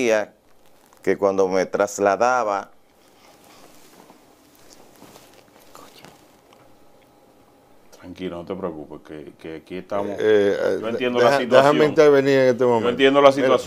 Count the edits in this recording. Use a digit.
0